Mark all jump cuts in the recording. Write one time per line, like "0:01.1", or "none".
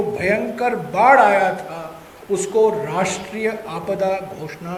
none